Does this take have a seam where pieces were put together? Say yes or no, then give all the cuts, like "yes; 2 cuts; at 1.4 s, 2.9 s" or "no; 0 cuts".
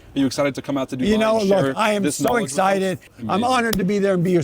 yes; 1 cut; at 3.2 s